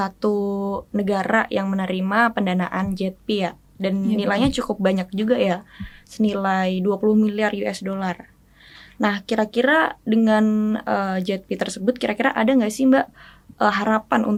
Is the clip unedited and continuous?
yes; 0 cuts

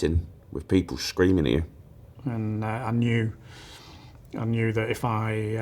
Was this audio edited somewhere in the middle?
yes; 1 cut; at 2.1 s

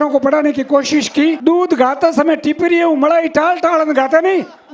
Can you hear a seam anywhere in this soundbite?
yes; 1 cut; at 1.4 s

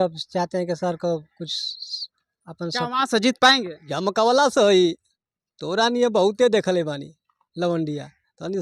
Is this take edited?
yes; 1 cut; at 3.8 s

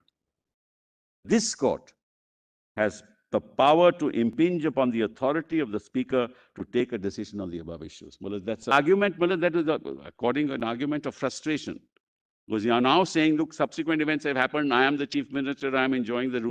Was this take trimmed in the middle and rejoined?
yes; 2 cuts; at 1.2 s, 8.7 s

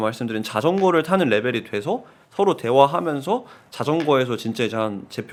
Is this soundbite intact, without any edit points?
yes; 0 cuts

